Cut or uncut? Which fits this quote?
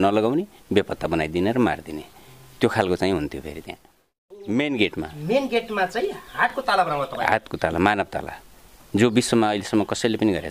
cut